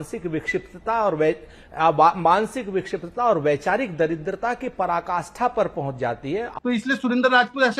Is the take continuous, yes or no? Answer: no